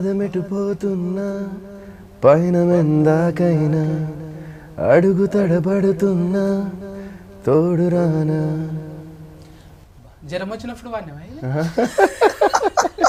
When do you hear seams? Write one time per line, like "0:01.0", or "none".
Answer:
none